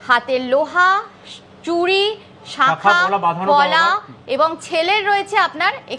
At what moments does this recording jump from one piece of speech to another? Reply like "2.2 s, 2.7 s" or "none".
none